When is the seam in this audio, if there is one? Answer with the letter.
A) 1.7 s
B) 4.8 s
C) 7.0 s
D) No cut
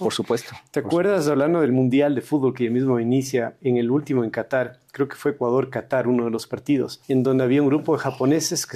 C